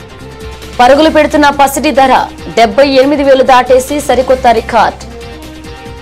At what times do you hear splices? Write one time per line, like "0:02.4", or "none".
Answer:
0:05.0